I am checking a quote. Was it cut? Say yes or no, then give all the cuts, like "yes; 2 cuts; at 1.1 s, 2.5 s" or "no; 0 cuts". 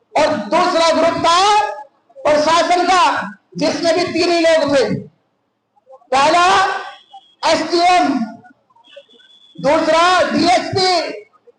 no; 0 cuts